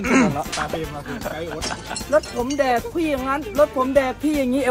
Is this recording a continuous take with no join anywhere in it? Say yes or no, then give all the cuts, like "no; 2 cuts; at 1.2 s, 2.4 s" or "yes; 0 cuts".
no; 1 cut; at 1.4 s